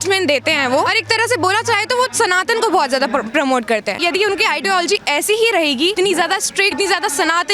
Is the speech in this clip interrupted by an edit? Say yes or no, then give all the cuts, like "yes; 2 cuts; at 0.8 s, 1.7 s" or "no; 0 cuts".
yes; 4 cuts; at 0.9 s, 4.0 s, 5.9 s, 6.7 s